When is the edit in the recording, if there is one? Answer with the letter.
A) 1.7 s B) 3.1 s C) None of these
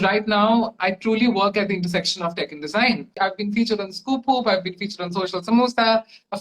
B